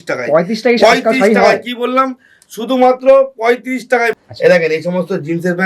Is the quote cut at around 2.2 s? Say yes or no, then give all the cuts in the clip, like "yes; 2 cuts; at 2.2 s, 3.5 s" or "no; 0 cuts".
no; 1 cut; at 4.2 s